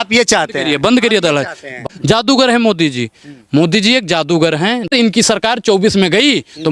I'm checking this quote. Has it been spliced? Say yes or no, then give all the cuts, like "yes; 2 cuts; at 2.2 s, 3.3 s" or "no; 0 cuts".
yes; 2 cuts; at 1.8 s, 4.9 s